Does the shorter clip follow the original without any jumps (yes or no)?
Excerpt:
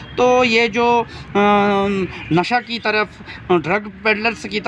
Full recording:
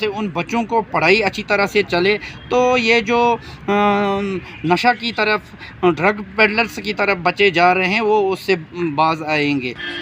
yes